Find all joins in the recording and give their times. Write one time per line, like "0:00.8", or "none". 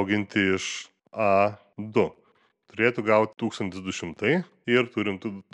0:01.7
0:04.5